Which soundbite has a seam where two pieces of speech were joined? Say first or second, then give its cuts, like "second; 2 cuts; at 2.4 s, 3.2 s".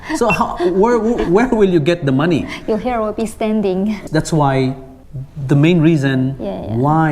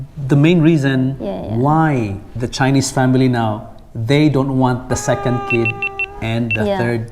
first; 1 cut; at 4.0 s